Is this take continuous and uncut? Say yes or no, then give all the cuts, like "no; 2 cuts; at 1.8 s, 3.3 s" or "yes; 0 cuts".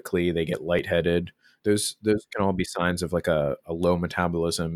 yes; 0 cuts